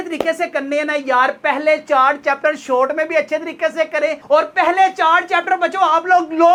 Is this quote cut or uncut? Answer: uncut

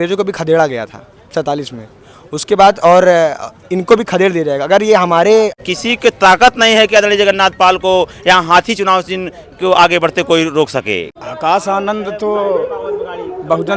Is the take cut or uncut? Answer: cut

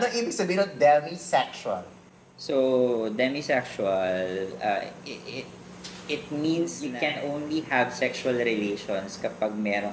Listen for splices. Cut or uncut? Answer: cut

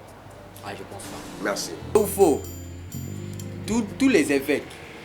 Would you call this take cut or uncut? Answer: cut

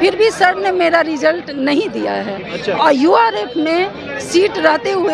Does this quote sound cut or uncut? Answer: uncut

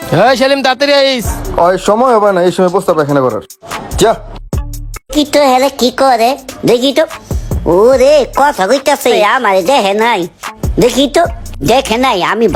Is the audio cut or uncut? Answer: uncut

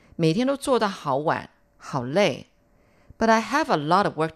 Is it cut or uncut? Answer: cut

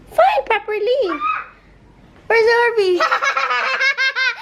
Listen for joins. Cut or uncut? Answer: uncut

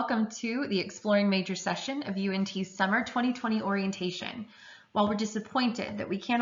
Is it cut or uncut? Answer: uncut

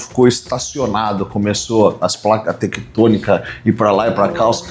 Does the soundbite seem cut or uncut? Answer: uncut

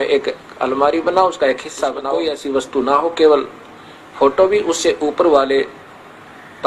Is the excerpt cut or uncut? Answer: cut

